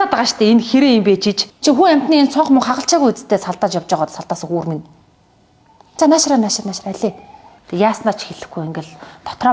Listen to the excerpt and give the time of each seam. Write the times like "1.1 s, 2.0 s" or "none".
1.4 s